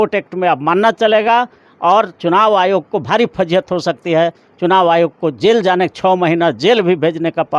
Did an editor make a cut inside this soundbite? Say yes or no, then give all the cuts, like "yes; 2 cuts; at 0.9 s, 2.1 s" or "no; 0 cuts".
no; 0 cuts